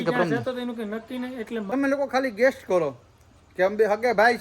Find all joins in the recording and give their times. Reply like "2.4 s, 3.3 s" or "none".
1.7 s